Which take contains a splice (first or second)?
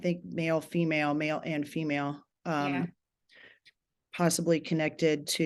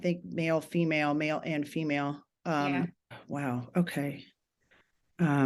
second